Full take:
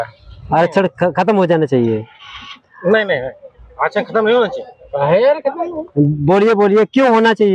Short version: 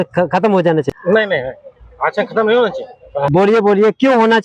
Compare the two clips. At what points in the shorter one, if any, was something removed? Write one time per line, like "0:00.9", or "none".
0:00.9
0:03.3